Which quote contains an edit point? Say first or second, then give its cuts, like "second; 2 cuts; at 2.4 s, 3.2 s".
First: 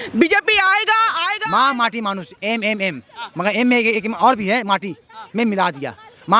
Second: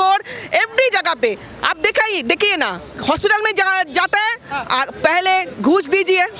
first; 1 cut; at 1.4 s